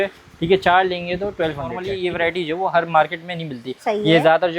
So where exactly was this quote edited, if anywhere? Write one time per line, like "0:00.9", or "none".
0:02.0